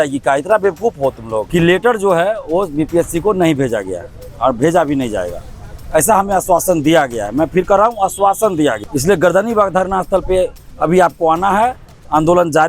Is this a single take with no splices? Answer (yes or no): no